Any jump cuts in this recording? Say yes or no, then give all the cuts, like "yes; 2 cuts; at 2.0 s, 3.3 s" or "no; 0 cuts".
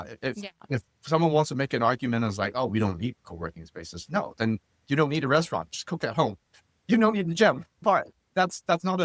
yes; 1 cut; at 7.8 s